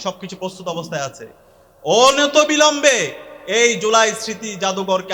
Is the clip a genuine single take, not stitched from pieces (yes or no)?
yes